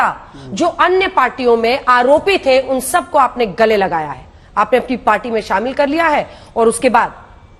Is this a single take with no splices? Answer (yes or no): yes